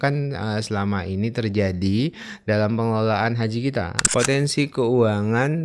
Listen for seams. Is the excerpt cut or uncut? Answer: cut